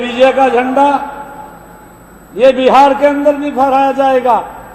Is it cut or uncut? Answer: uncut